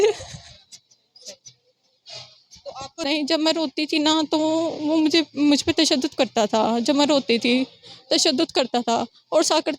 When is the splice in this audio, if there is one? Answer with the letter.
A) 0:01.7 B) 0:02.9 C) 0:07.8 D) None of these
B